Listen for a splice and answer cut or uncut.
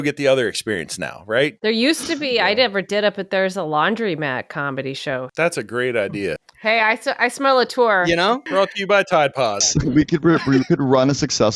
cut